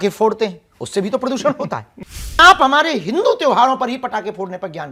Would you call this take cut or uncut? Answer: cut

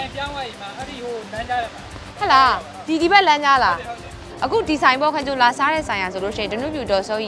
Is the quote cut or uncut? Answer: cut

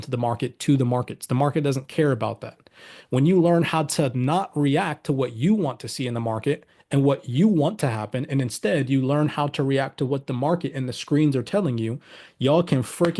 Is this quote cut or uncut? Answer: uncut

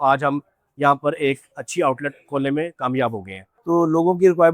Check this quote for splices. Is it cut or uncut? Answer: cut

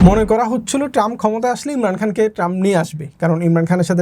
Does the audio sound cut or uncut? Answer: uncut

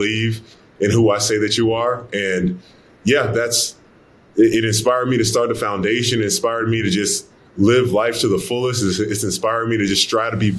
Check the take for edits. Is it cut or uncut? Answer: uncut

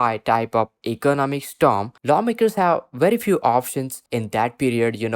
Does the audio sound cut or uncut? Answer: cut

